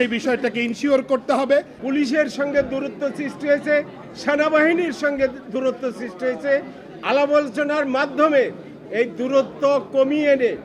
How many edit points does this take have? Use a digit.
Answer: 1